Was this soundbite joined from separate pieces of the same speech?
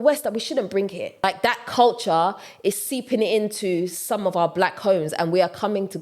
yes; 1 cut; at 1.2 s

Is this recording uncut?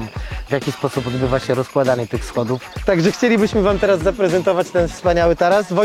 no; 1 cut; at 2.7 s

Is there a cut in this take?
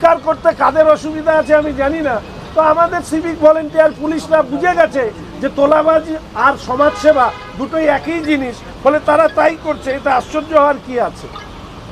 no; 0 cuts

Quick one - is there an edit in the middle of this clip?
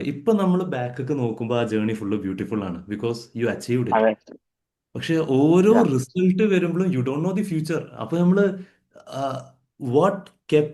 no; 0 cuts

